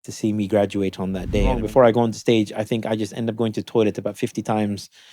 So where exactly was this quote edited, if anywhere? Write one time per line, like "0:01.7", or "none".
0:01.6